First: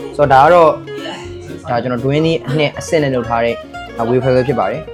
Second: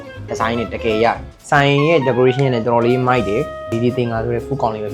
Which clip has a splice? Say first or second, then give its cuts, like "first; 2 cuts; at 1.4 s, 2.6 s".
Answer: second; 2 cuts; at 1.3 s, 3.7 s